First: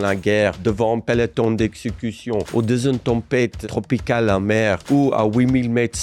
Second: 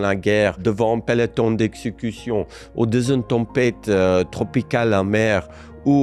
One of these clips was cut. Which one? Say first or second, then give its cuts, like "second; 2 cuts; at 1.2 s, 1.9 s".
first; 3 cuts; at 2.5 s, 3.6 s, 4.8 s